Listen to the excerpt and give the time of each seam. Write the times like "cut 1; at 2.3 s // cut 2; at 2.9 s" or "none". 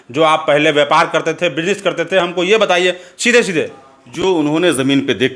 none